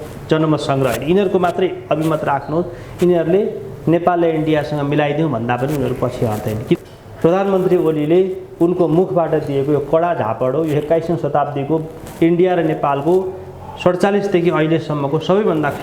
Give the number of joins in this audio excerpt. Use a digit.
1